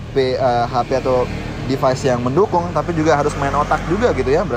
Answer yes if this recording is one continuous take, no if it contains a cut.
yes